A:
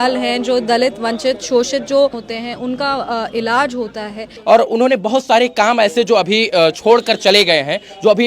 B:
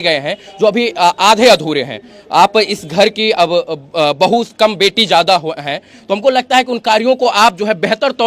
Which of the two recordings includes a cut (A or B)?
A